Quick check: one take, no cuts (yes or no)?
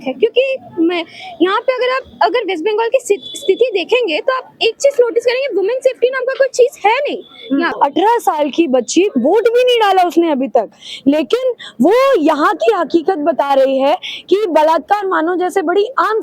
no